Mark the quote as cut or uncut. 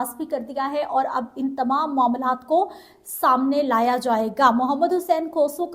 uncut